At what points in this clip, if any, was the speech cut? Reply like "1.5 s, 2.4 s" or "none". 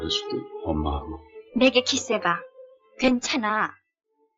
1.4 s